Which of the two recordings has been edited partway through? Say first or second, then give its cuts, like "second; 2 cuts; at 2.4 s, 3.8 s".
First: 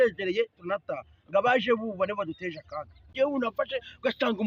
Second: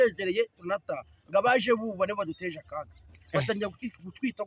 first; 1 cut; at 3.1 s